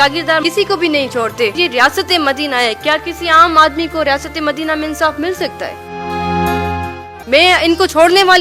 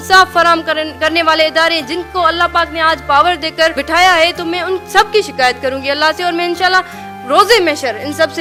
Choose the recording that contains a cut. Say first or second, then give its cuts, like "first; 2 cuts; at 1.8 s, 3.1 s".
first; 2 cuts; at 1.5 s, 7.2 s